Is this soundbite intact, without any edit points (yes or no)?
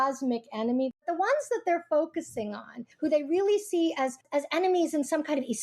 no